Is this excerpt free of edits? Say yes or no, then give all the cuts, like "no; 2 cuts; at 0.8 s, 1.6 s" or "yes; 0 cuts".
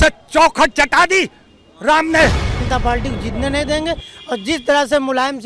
no; 1 cut; at 2.6 s